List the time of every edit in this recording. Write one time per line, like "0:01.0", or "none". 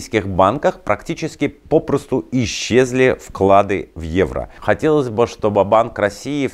0:04.5

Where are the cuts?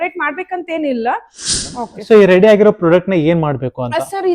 0:01.7

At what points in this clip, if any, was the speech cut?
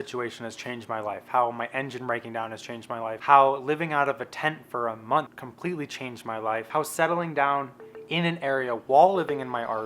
0:03.2
0:05.4
0:06.7

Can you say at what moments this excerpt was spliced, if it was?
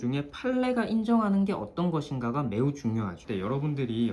0:03.2

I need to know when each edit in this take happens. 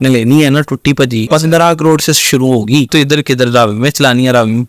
0:01.3
0:02.9

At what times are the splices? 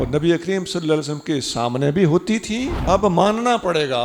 0:02.7

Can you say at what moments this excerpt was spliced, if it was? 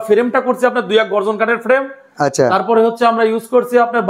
none

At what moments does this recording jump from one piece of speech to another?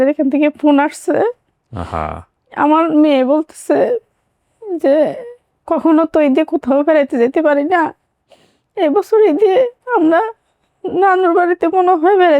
none

